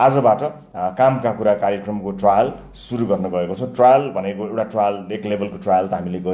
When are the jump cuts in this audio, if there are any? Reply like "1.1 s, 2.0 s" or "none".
none

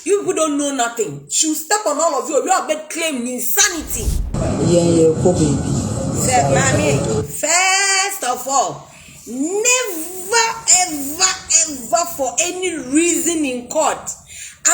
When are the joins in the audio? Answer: 4.1 s

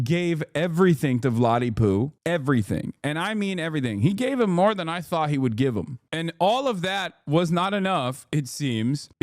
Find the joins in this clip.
6.0 s

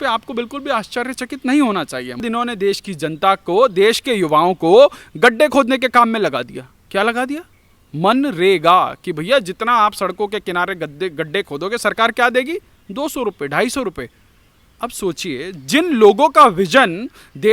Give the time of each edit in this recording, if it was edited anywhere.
2.2 s

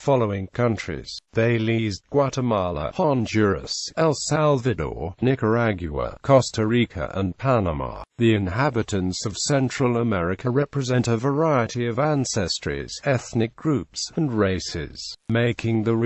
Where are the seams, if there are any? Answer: 11.9 s

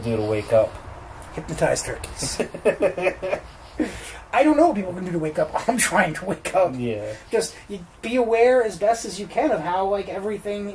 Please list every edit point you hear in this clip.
none

